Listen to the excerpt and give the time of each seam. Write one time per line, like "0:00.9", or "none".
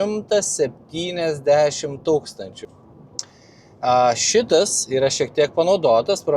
0:02.6